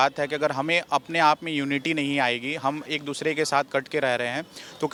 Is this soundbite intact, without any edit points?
yes; 0 cuts

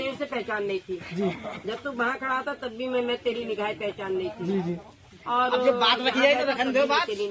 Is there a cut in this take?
no; 0 cuts

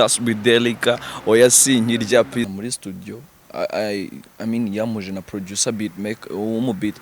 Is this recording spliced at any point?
yes; 1 cut; at 2.5 s

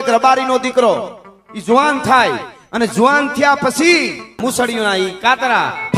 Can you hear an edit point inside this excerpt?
yes; 1 cut; at 4.4 s

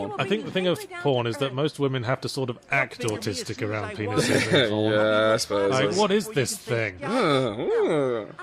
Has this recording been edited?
no; 0 cuts

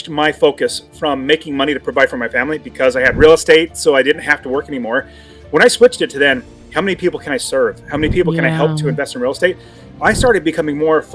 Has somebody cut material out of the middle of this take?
no; 0 cuts

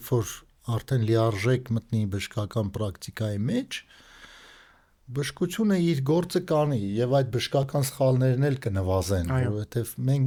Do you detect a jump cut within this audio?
no; 0 cuts

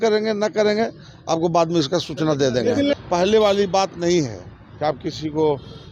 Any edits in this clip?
yes; 1 cut; at 2.9 s

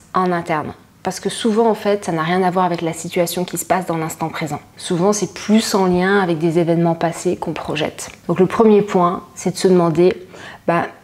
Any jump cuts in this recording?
yes; 2 cuts; at 4.7 s, 8.1 s

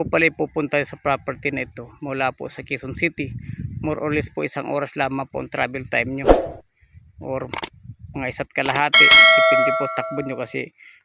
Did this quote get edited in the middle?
yes; 2 cuts; at 9.1 s, 9.9 s

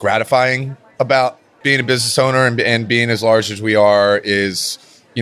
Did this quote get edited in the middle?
yes; 1 cut; at 1.5 s

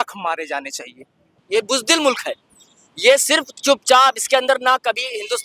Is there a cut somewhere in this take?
yes; 1 cut; at 1.3 s

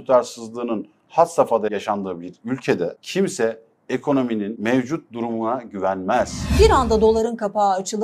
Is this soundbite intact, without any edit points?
no; 4 cuts; at 1.7 s, 3.0 s, 4.5 s, 6.5 s

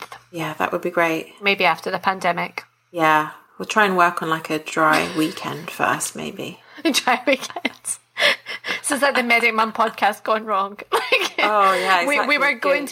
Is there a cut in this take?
no; 0 cuts

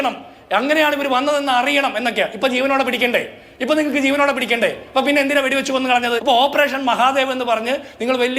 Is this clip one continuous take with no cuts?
no; 1 cut; at 6.2 s

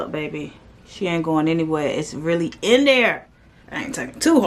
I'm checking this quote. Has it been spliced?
no; 0 cuts

